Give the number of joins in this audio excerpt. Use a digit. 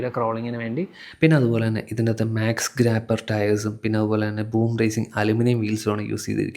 1